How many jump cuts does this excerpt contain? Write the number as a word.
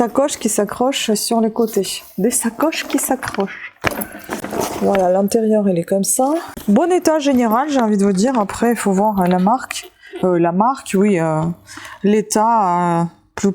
zero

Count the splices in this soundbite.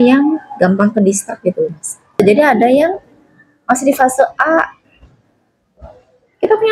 one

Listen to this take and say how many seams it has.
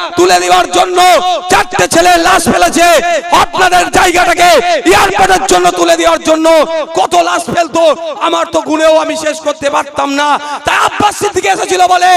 zero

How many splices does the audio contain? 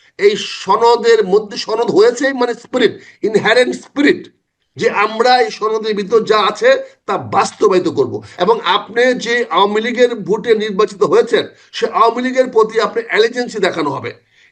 one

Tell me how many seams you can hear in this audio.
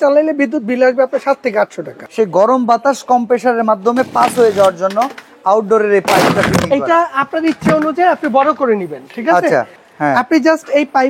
two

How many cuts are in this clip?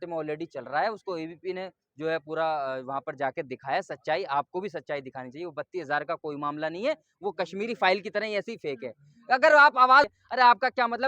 one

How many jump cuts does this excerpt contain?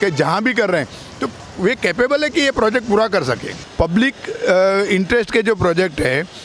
one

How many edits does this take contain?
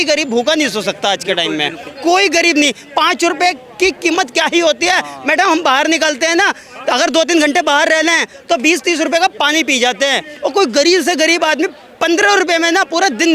zero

